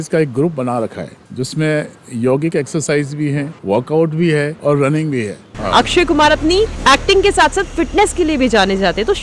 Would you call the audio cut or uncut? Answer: cut